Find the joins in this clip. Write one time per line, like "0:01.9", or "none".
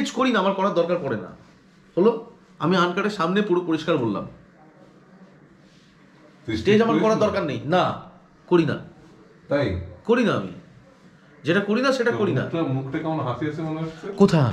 none

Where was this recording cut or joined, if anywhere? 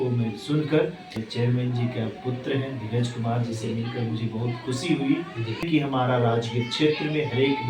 0:01.2
0:05.7

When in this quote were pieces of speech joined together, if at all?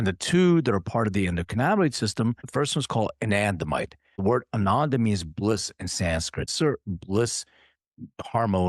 0:02.4
0:04.2
0:06.5

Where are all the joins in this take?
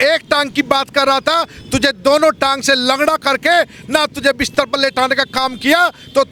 none

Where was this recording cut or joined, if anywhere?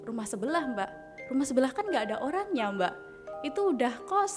none

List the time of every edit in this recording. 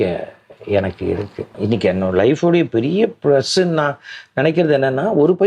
0:01.5

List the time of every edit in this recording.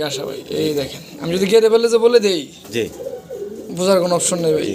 none

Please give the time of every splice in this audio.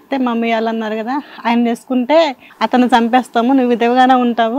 none

